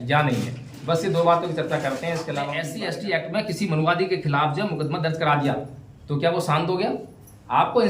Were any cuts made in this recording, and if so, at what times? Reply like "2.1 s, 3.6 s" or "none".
2.7 s